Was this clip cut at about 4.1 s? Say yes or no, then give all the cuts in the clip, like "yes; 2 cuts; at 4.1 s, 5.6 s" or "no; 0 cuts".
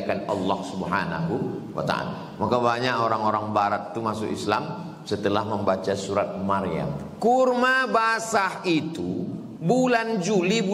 no; 1 cut; at 7.0 s